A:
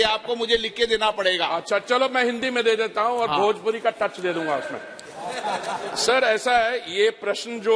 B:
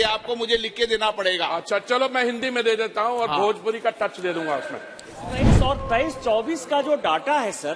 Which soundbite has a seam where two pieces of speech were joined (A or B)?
B